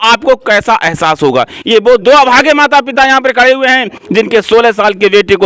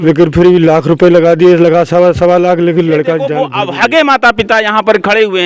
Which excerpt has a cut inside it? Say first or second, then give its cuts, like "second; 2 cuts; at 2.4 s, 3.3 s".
second; 1 cut; at 3.4 s